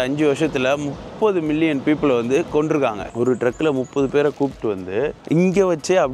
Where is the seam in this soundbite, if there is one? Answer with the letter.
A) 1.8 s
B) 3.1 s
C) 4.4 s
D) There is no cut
B